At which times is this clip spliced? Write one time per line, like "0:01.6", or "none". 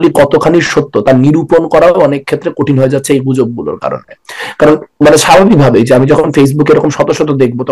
none

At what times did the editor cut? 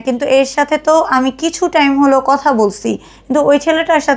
none

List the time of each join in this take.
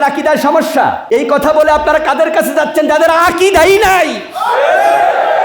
0:01.0

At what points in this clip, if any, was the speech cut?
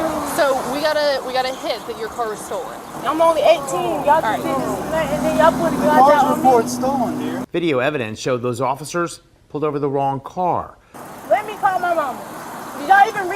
0:02.8
0:07.4
0:10.8

